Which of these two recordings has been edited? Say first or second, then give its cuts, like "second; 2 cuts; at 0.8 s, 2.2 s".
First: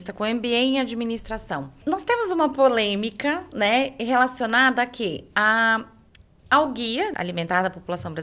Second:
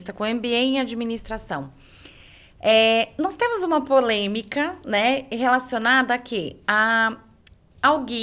first; 2 cuts; at 1.8 s, 7.1 s